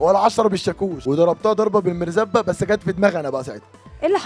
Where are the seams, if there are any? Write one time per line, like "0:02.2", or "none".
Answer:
0:00.9